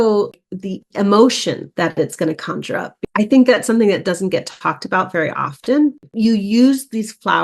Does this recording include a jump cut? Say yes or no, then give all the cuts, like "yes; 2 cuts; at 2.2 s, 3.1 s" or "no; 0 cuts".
yes; 1 cut; at 6.0 s